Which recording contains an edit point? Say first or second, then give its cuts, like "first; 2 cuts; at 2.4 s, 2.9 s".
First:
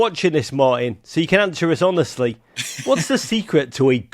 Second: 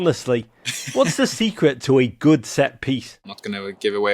second; 1 cut; at 3.2 s